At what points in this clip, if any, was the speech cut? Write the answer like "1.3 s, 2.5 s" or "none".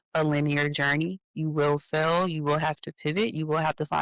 none